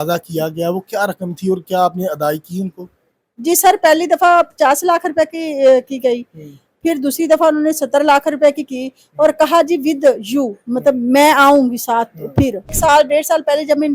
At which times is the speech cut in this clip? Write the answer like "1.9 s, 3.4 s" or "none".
12.8 s